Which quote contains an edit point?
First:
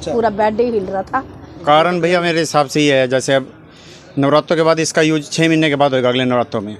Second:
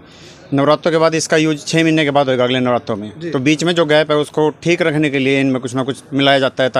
first; 1 cut; at 1.5 s

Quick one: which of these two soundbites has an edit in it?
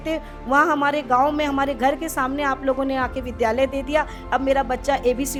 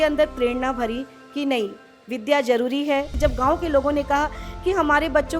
second; 1 cut; at 3.1 s

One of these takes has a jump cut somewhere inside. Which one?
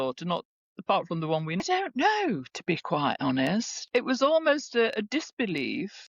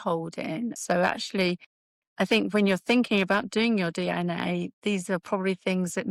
first; 1 cut; at 1.6 s

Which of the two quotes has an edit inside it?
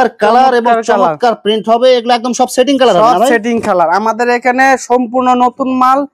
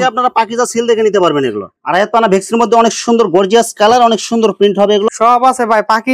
second; 2 cuts; at 1.7 s, 5.1 s

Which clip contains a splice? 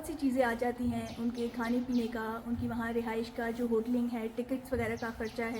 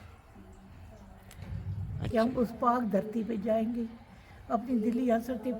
second; 1 cut; at 2.1 s

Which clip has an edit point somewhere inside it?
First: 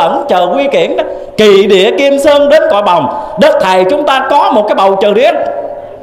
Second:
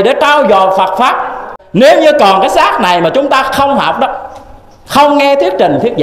second; 1 cut; at 1.5 s

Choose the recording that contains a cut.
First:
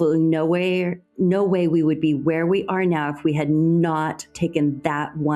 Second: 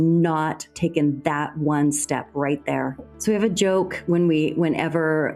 second; 1 cut; at 3.0 s

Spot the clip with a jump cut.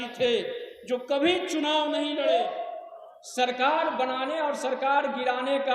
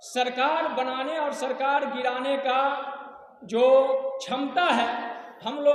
first; 1 cut; at 2.2 s

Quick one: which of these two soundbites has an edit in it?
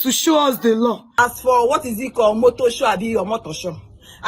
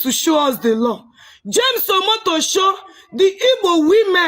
first; 1 cut; at 1.0 s

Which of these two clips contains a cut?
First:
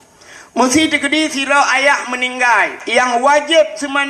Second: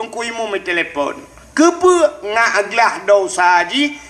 first; 1 cut; at 2.8 s

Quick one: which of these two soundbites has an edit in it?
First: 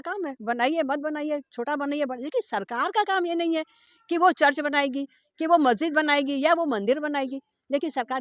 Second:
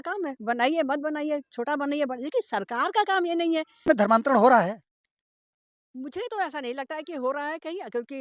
second; 1 cut; at 3.9 s

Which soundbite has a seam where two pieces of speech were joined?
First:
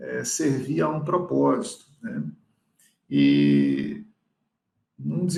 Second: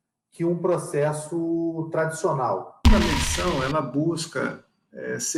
second; 1 cut; at 2.7 s

